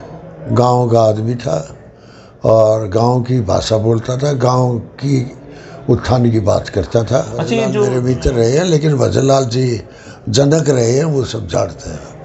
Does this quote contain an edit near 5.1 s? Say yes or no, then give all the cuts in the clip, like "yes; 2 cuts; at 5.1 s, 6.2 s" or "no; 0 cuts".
no; 1 cut; at 7.9 s